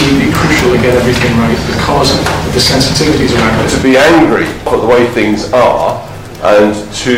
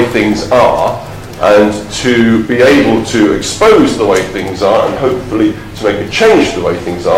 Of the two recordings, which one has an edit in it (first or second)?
first